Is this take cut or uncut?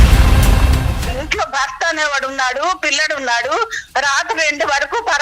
cut